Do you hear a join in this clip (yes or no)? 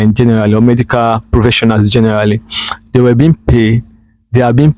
no